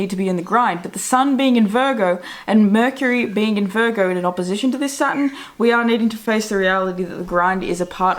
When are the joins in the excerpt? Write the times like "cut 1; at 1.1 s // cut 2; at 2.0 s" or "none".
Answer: none